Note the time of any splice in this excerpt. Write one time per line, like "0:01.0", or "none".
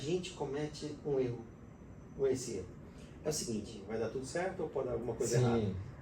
0:03.8